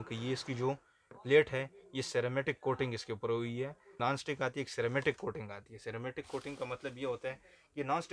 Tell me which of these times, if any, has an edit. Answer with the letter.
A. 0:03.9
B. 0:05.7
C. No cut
A